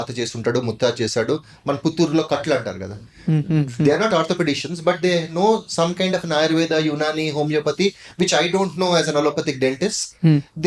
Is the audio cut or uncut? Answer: uncut